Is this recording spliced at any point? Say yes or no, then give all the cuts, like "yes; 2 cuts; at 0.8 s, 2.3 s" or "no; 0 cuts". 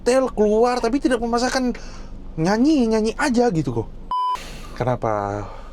yes; 1 cut; at 4.3 s